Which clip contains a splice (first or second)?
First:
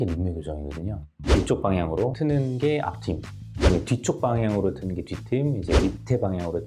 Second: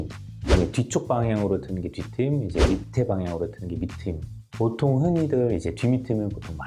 first